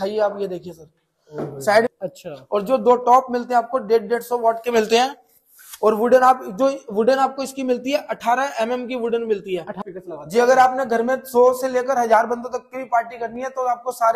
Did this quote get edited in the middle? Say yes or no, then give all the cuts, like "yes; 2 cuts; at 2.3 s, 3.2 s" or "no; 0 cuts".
yes; 2 cuts; at 1.9 s, 9.7 s